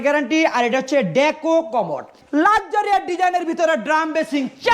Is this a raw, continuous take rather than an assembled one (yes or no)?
no